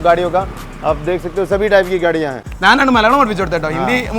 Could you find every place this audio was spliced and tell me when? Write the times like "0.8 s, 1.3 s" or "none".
2.5 s